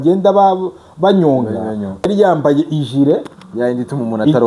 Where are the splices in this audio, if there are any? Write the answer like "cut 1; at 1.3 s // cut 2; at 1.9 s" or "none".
cut 1; at 2.1 s

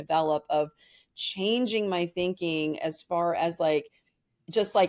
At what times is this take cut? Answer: none

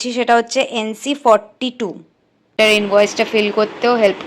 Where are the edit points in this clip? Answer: cut 1; at 2.5 s

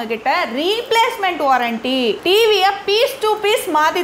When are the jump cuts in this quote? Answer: none

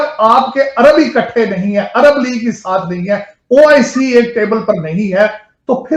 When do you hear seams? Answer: none

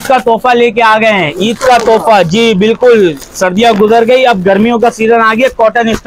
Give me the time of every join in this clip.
none

